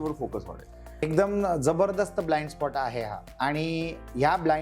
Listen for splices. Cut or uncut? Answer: cut